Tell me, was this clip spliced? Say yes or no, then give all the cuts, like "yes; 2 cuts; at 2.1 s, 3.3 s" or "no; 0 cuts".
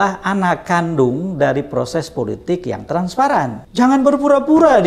yes; 1 cut; at 3.6 s